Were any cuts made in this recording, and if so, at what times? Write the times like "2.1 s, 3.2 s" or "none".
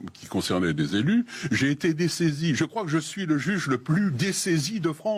none